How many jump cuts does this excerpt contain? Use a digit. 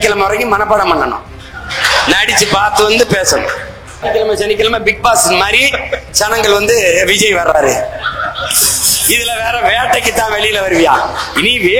1